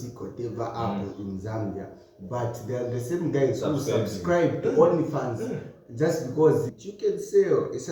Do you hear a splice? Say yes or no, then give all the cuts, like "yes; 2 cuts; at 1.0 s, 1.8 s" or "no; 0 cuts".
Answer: yes; 1 cut; at 6.8 s